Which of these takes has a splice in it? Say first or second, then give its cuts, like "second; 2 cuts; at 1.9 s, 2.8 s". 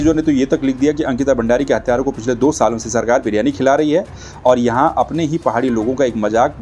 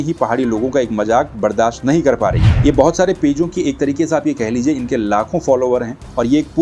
second; 1 cut; at 2.5 s